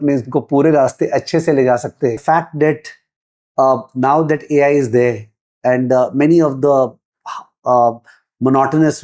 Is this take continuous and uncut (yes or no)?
no